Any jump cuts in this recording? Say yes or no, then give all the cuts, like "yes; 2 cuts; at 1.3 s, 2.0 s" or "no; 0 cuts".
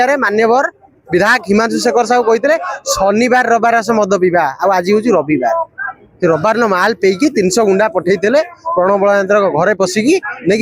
no; 0 cuts